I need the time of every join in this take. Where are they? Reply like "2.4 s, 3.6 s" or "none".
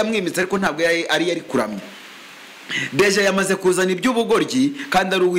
none